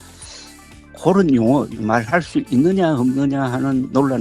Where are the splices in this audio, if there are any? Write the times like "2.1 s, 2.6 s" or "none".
1.7 s